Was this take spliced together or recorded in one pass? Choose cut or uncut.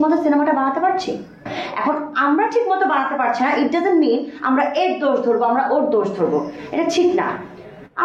cut